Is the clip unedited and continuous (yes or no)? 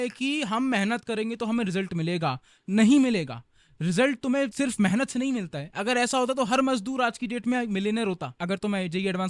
no